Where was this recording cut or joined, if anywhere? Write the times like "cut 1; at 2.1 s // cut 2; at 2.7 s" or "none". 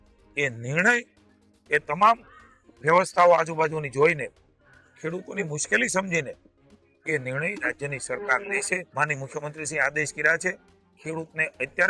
cut 1; at 8.9 s